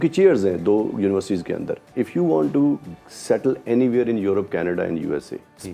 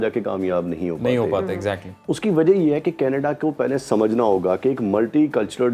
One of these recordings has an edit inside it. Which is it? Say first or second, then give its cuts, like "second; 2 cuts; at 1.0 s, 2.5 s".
first; 1 cut; at 1.8 s